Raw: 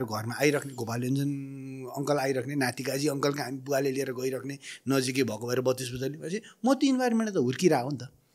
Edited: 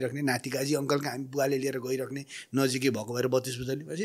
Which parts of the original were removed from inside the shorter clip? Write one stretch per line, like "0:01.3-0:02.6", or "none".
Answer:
none